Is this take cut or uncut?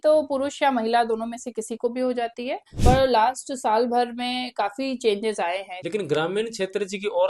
cut